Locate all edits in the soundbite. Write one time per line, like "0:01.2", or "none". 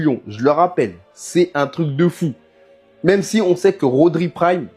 none